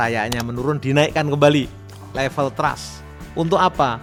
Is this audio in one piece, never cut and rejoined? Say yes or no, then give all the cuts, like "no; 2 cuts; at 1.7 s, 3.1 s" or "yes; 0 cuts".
yes; 0 cuts